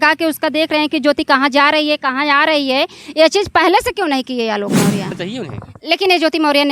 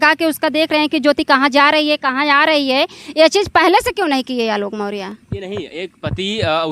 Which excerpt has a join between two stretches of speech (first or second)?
first